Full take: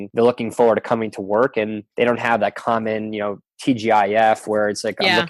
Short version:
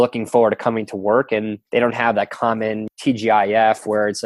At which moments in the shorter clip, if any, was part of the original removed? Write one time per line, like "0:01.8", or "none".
0:02.9